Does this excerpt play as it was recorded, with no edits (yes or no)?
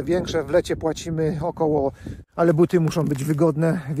no